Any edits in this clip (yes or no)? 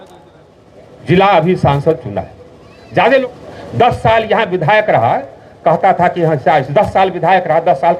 yes